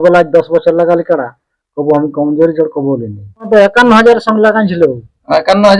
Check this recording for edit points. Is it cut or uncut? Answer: cut